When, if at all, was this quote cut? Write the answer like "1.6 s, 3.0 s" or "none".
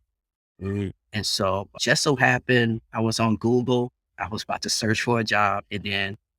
1.7 s

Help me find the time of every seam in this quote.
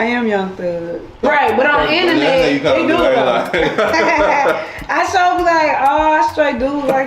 1.2 s

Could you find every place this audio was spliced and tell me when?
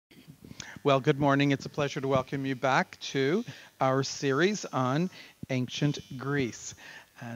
none

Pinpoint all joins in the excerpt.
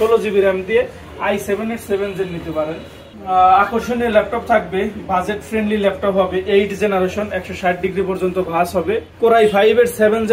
3.1 s, 9.0 s

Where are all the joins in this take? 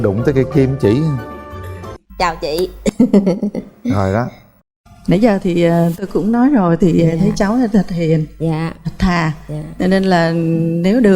1.9 s

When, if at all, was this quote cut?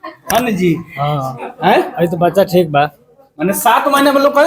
none

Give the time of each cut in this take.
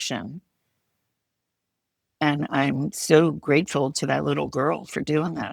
2.9 s

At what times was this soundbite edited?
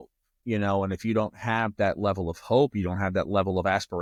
none

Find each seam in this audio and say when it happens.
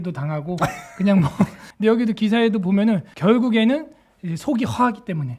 1.6 s, 3.1 s

